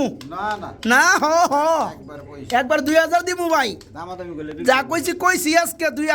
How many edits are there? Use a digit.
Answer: 0